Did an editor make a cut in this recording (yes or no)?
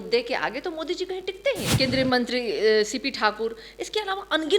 yes